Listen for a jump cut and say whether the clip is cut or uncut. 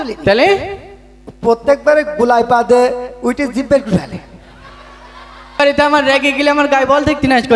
cut